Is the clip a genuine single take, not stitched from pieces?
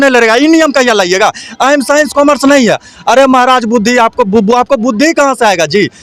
yes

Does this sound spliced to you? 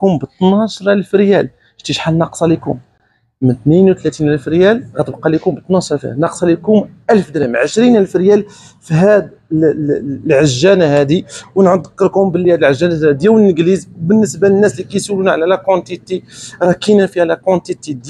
no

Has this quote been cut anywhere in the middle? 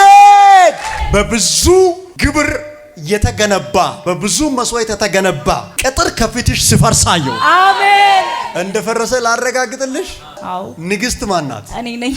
yes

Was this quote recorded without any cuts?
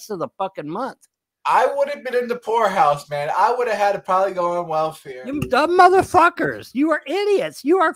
no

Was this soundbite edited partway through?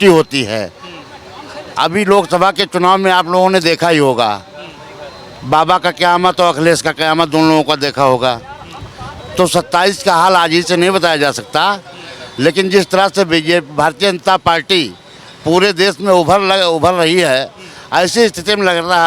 no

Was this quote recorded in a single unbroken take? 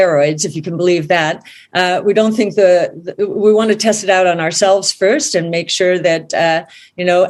yes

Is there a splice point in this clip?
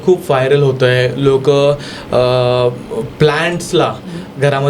no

